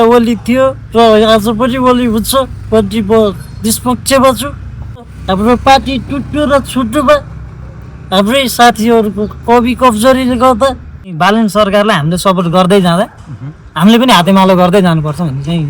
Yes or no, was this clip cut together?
yes